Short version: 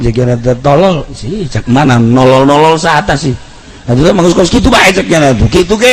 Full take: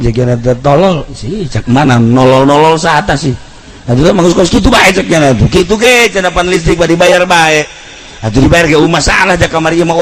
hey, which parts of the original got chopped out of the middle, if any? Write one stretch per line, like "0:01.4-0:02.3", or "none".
none